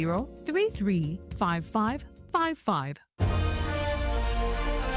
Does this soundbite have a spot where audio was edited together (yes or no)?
yes